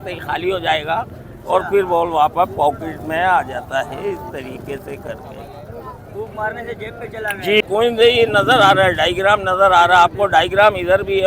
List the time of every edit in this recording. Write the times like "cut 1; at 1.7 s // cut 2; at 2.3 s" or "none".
cut 1; at 7.6 s